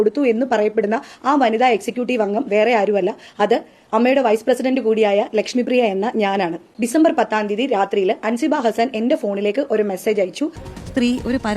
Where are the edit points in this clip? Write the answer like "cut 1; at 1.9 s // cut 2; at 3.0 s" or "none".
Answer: cut 1; at 10.7 s

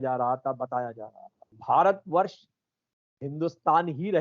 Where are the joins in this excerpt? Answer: cut 1; at 1.6 s

